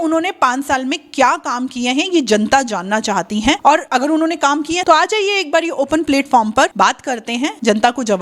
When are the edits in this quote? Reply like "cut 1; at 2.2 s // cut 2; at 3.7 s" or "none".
cut 1; at 4.8 s